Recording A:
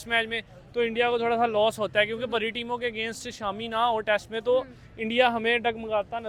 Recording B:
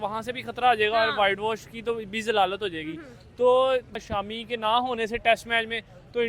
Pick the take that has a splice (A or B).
B